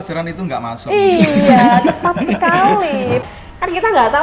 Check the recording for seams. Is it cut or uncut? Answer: cut